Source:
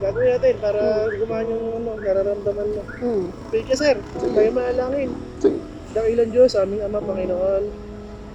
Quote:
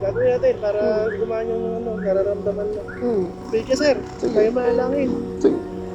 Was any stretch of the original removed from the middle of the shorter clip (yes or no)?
no